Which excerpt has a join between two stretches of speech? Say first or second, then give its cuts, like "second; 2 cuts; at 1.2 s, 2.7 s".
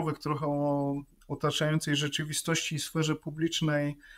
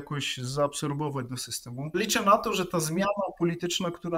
second; 1 cut; at 1.9 s